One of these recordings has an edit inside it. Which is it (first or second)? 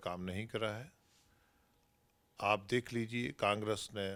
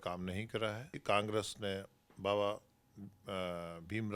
second